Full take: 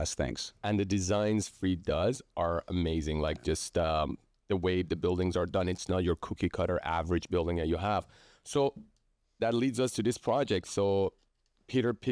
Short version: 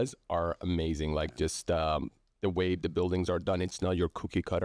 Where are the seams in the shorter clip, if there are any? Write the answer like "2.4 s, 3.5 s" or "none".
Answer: none

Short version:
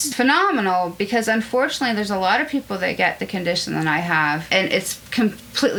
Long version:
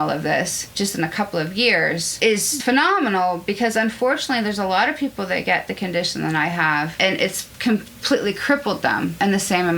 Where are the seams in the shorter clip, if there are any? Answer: none

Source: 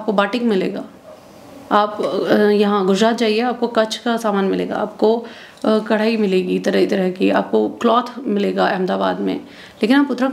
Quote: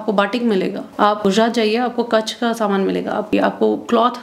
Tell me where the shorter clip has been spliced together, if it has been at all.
1.2 s, 3.3 s

